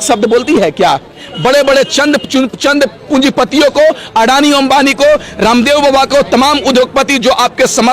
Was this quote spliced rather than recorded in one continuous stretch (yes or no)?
yes